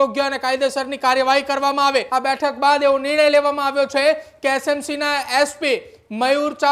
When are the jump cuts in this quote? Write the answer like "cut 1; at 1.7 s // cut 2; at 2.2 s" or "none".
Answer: cut 1; at 2.1 s